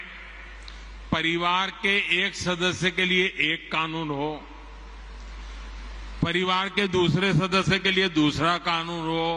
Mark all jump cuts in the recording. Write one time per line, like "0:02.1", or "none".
none